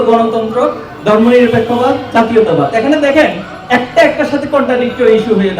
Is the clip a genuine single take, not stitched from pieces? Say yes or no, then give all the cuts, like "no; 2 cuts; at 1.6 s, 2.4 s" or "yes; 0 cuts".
yes; 0 cuts